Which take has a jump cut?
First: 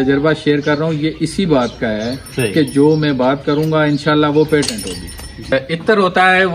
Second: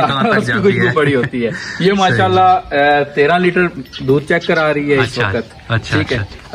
first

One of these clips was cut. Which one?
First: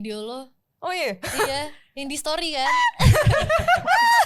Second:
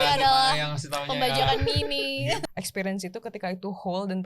second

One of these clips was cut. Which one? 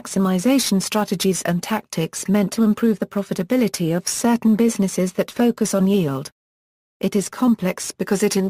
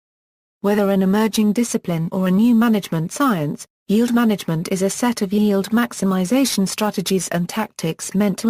first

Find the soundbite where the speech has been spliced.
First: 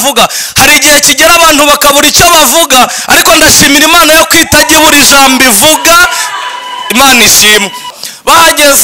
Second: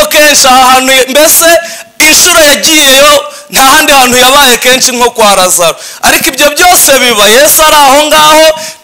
first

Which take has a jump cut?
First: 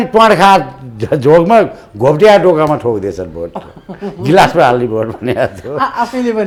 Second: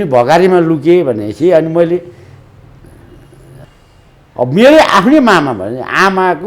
second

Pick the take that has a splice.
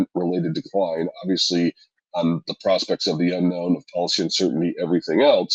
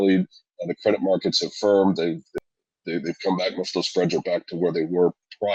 second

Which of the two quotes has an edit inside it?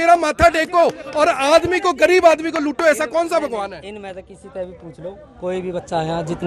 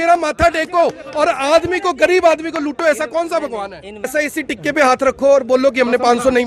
second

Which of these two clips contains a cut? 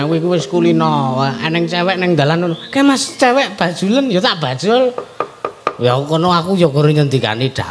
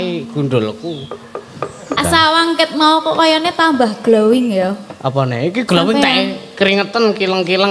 second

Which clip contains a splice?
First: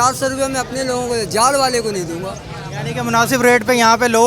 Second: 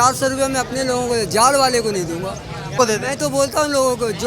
second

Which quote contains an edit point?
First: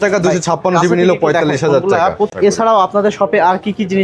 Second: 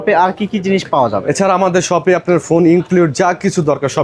first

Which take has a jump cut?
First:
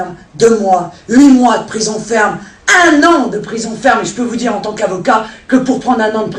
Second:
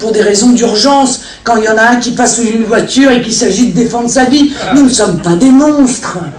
second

